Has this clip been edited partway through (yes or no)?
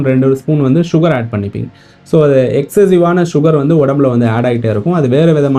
no